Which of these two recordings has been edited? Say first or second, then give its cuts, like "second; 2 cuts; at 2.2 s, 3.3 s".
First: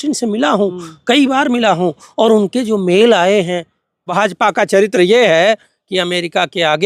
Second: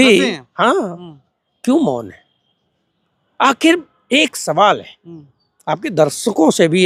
first; 1 cut; at 4.1 s